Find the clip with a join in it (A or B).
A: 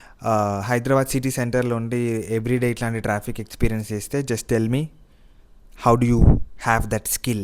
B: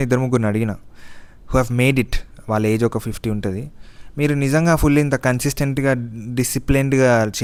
A